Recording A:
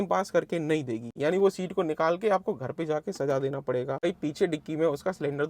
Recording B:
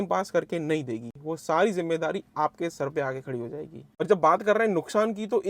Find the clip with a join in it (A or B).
A